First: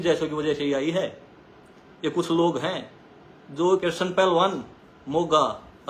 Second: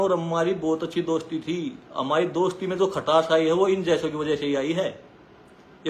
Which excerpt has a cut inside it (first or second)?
first